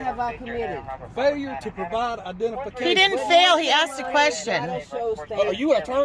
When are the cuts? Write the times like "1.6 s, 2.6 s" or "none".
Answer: none